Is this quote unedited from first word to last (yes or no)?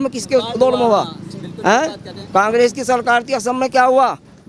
yes